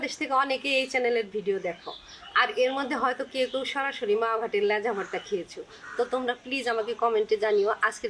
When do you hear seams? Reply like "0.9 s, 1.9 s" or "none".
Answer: none